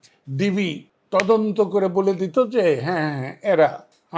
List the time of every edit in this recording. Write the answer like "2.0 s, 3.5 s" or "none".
0.9 s